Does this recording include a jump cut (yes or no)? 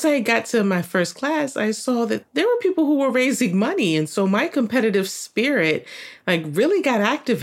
no